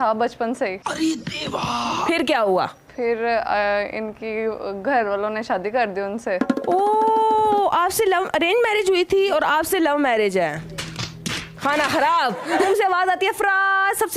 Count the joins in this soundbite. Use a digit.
2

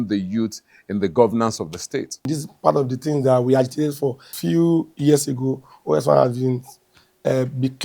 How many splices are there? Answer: 2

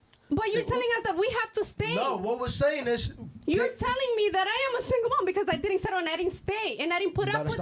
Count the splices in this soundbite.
1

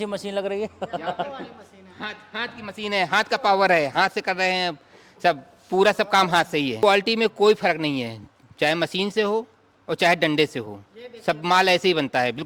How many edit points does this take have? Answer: 1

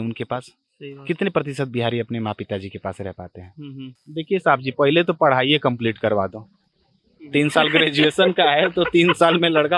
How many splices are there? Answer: 1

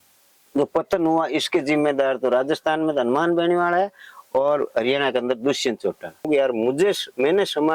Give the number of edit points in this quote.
1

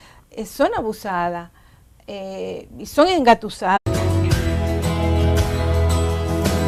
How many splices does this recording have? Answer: 0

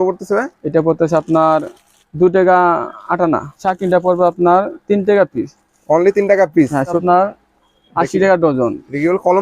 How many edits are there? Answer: 2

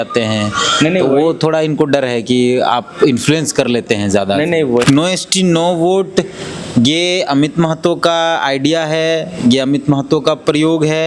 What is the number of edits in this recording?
1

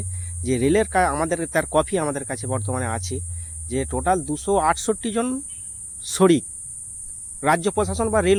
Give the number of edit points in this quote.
0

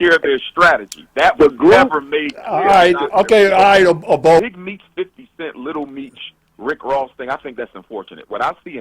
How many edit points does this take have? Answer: 1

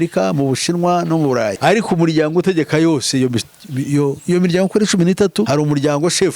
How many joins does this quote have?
1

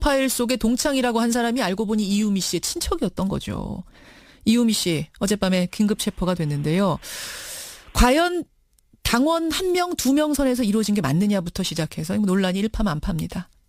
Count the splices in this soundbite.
0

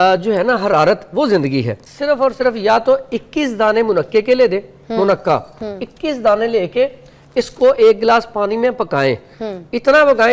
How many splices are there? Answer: 1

